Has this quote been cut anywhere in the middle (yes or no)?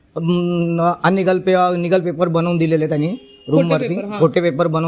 no